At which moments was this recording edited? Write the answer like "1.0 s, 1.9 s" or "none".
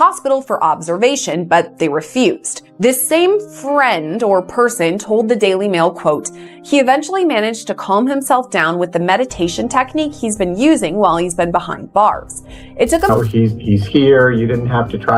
13.1 s